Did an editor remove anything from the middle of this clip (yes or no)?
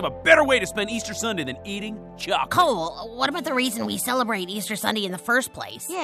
yes